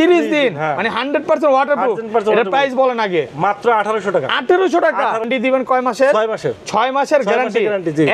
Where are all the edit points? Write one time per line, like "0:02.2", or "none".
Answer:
0:05.3